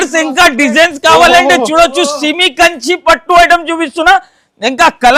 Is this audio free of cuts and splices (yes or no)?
yes